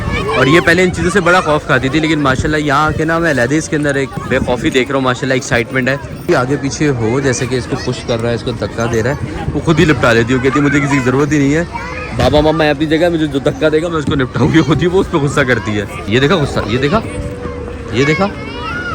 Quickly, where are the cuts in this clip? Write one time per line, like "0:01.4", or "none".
0:04.2
0:06.1
0:16.1